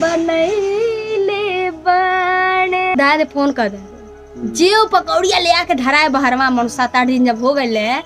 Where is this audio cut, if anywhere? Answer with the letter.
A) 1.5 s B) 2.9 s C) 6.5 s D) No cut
B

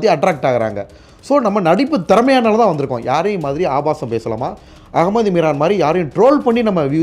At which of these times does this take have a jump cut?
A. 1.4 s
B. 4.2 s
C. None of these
C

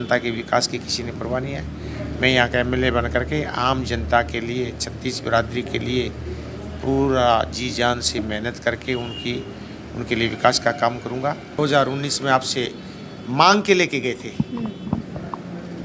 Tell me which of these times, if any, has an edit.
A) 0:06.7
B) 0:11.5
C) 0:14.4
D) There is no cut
B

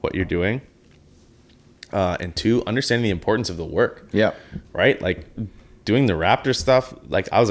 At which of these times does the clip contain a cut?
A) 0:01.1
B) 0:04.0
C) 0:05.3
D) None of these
D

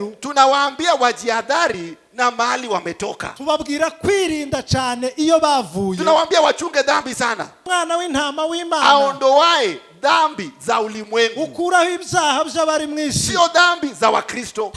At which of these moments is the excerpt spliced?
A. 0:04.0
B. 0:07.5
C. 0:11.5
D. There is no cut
B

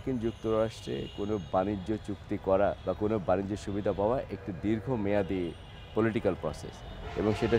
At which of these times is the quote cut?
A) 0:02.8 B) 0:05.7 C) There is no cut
A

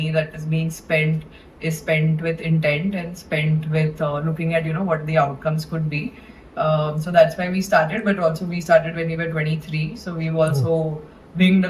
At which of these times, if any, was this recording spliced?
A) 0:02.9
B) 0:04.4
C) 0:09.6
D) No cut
D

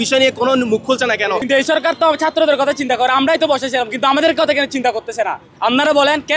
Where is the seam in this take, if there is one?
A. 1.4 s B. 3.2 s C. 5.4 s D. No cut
A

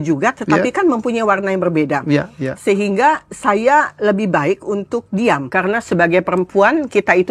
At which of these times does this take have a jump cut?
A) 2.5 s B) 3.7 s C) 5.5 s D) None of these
C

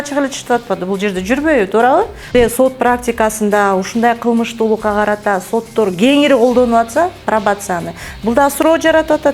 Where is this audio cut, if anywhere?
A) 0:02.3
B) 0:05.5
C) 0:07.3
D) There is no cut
A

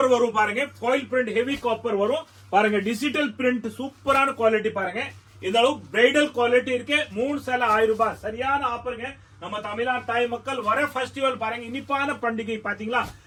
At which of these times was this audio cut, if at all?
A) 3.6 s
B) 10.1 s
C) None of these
C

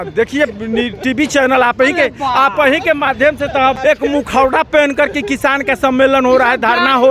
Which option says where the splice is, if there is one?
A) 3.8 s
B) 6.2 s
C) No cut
A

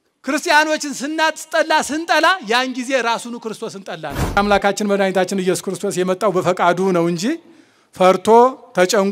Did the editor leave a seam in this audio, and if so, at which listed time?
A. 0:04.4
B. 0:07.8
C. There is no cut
A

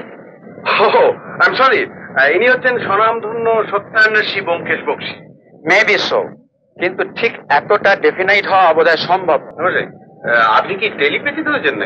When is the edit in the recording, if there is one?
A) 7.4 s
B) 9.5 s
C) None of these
B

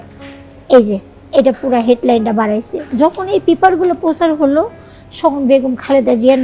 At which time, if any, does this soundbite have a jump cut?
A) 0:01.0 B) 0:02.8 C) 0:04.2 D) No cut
B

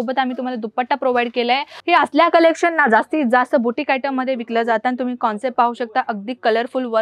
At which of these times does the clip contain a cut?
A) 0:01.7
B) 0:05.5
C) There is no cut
A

